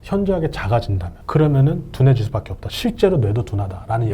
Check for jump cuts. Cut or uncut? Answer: cut